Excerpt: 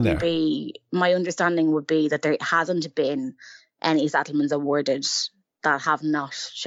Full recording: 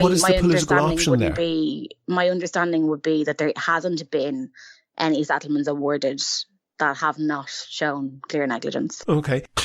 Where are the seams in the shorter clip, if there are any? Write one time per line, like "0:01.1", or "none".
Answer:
none